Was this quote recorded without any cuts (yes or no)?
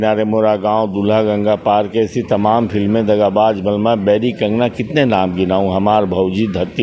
yes